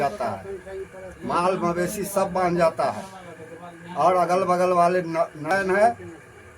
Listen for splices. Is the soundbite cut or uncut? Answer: cut